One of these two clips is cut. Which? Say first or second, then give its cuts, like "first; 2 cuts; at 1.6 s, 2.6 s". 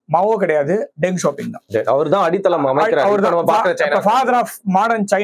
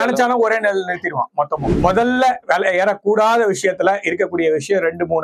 second; 1 cut; at 1.6 s